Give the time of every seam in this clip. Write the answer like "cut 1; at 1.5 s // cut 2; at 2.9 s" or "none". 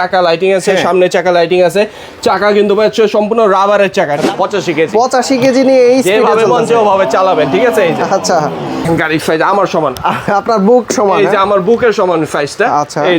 cut 1; at 4.2 s // cut 2; at 8.8 s